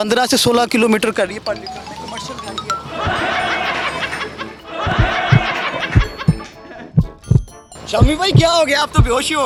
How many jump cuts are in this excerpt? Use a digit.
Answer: 0